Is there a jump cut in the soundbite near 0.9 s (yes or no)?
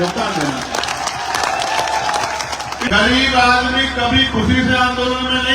no